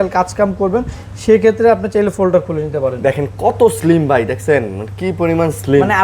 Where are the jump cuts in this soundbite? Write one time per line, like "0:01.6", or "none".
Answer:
none